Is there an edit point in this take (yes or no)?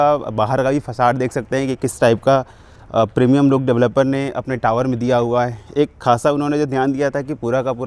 no